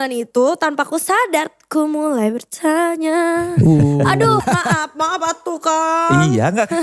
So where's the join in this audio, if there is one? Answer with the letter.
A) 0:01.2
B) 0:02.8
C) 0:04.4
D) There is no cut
C